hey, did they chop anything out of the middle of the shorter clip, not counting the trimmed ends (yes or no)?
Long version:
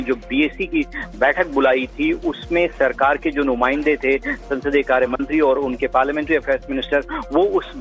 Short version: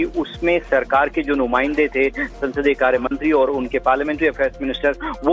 no